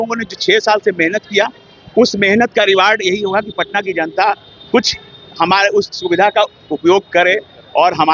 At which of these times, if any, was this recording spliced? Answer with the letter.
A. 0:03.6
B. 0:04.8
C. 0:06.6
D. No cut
D